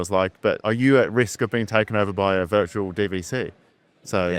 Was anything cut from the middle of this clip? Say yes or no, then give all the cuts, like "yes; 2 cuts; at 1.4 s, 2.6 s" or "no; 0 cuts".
no; 0 cuts